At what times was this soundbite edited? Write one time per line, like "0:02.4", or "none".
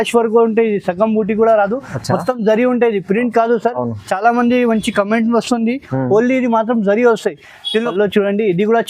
0:07.9